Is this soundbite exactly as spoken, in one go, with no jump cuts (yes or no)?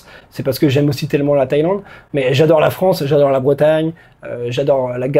yes